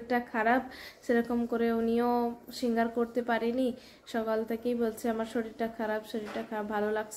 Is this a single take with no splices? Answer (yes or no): yes